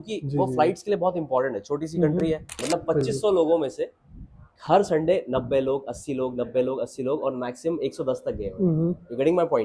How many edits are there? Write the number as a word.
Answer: one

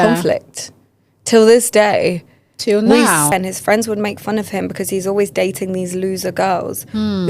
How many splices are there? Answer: one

